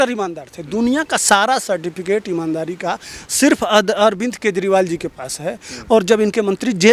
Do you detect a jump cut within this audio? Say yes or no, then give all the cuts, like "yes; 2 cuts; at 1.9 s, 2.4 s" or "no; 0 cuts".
no; 0 cuts